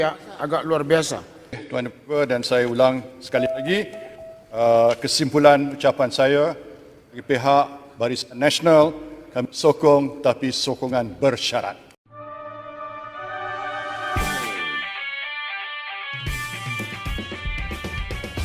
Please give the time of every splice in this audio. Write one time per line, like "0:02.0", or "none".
0:01.6
0:11.9